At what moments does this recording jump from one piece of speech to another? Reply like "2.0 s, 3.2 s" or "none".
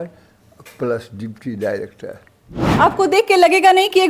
2.6 s